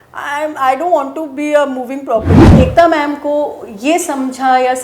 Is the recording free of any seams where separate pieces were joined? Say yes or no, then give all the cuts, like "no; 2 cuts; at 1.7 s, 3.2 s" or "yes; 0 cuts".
no; 1 cut; at 2.4 s